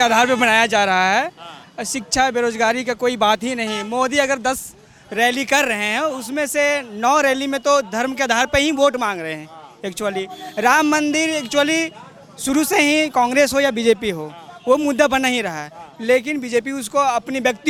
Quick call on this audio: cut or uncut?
uncut